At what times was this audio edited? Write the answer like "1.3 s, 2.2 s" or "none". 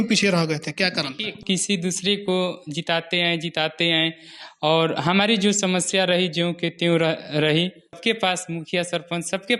1.4 s, 8.0 s